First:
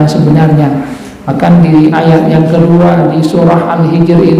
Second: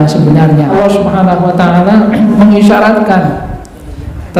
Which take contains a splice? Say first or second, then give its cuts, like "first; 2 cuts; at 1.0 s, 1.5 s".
second; 2 cuts; at 0.7 s, 2.3 s